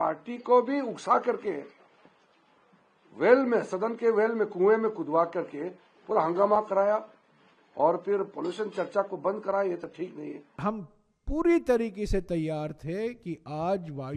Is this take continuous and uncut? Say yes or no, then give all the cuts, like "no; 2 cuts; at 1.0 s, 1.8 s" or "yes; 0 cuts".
no; 1 cut; at 10.6 s